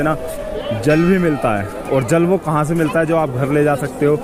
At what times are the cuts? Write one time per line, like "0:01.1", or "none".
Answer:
none